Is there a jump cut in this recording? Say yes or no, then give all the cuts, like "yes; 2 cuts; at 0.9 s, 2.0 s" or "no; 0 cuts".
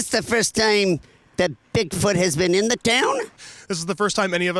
yes; 1 cut; at 3.4 s